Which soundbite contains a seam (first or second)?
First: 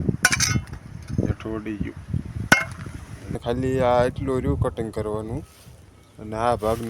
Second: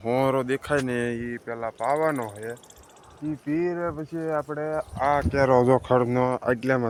first